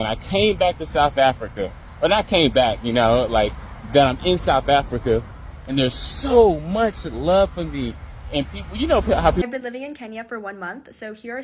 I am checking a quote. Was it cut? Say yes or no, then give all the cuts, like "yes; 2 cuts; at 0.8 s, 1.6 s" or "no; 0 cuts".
yes; 1 cut; at 9.4 s